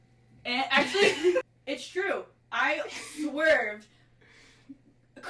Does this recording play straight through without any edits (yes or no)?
no